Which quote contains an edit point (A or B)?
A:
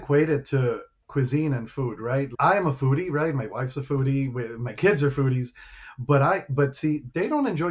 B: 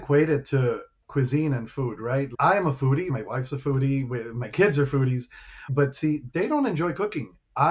B